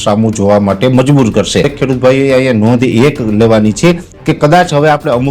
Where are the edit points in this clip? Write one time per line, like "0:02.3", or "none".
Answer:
0:01.7

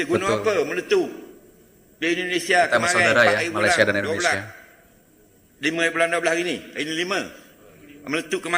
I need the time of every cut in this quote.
none

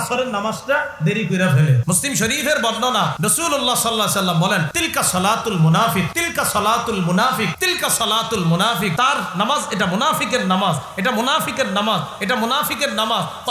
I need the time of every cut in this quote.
0:01.8
0:03.1
0:04.7
0:06.2
0:07.6
0:08.9

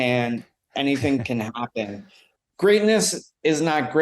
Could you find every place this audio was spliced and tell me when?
0:02.3

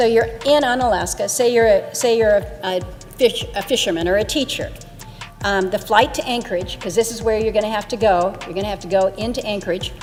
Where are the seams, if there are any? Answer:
none

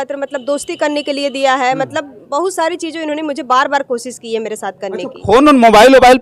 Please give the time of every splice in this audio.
none

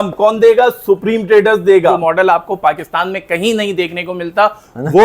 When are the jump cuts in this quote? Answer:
0:02.0

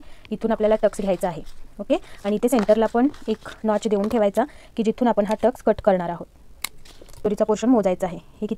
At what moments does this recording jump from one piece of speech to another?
0:07.2

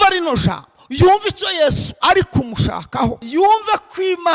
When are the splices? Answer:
0:03.2

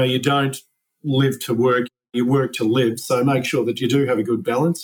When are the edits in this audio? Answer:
0:02.2

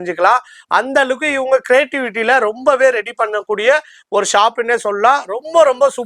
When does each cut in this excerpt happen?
none

